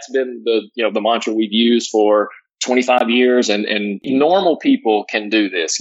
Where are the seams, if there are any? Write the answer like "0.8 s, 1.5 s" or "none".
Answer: 4.0 s